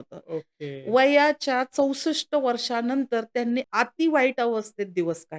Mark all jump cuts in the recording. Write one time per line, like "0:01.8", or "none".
0:03.7